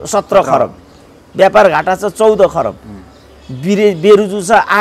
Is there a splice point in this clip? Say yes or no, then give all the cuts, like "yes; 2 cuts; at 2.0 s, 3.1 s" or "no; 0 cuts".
no; 0 cuts